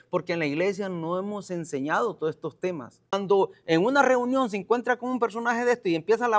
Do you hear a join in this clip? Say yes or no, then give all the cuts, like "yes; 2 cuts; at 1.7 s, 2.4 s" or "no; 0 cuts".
yes; 1 cut; at 3.2 s